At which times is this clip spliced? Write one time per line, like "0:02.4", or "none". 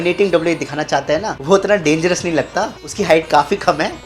0:01.3